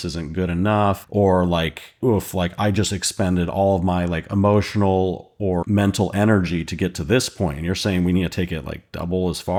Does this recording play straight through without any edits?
yes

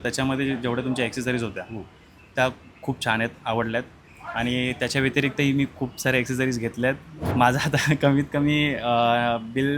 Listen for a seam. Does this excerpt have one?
yes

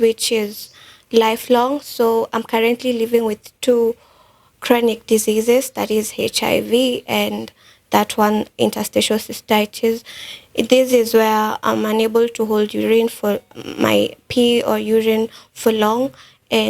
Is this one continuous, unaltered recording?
yes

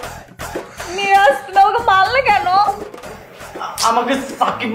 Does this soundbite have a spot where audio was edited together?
no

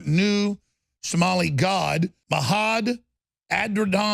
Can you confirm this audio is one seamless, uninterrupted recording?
no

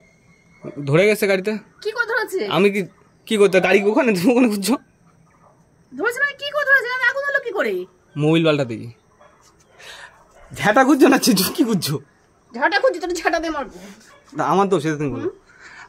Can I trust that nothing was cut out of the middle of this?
yes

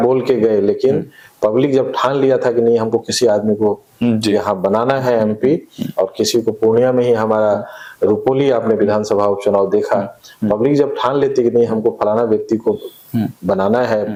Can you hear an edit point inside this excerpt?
no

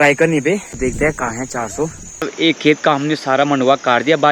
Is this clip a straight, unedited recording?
no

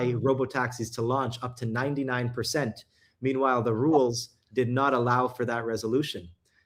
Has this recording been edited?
no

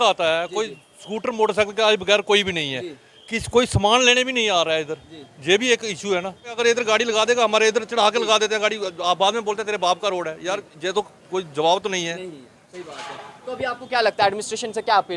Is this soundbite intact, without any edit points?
no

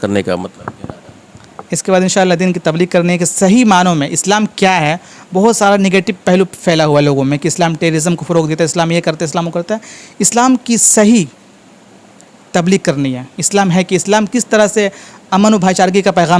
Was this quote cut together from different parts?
no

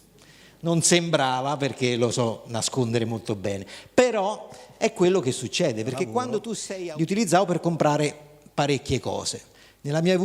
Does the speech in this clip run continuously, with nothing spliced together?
no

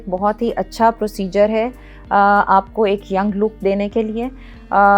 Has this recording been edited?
no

